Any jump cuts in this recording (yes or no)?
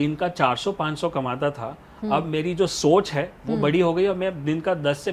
no